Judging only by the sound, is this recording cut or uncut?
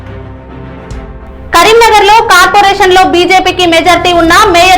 cut